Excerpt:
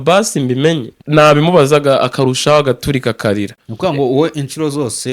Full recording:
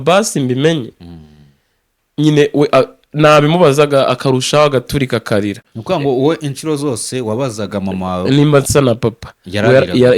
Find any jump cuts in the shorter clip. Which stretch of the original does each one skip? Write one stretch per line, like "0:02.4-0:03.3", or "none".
0:01.0-0:03.0